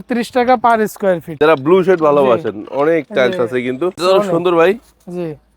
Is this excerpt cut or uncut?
cut